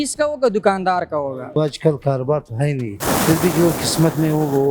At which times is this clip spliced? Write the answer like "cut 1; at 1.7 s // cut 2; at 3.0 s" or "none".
cut 1; at 1.6 s // cut 2; at 2.9 s